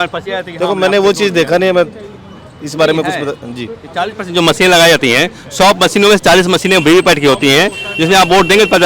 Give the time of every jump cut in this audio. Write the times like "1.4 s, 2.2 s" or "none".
none

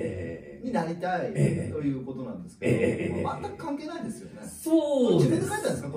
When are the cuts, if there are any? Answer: none

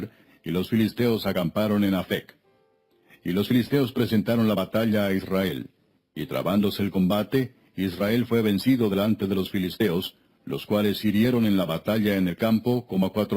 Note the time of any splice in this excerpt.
6.4 s

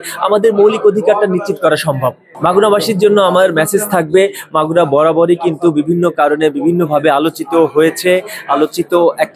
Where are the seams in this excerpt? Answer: none

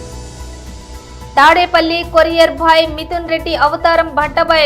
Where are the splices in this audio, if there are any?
1.1 s

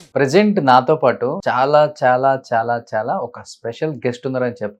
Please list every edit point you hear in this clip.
1.4 s

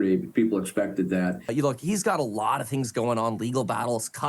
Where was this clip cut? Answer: 1.4 s

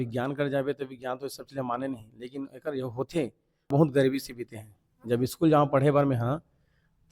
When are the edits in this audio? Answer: 3.7 s

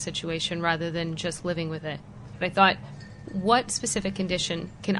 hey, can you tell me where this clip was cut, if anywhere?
2.3 s, 3.3 s

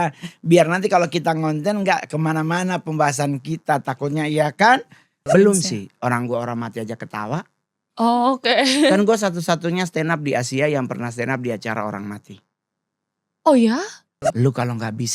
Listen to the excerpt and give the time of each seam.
5.2 s, 14.2 s

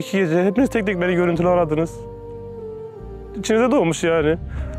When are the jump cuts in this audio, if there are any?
none

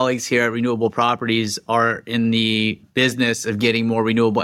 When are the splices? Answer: 2.8 s

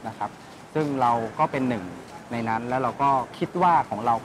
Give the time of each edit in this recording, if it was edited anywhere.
3.3 s

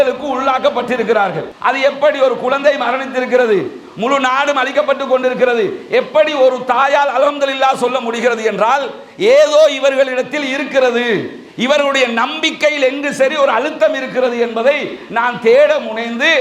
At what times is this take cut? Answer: 1.5 s

